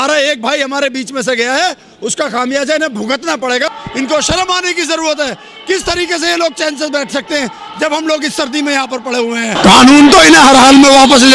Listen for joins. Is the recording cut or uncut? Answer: cut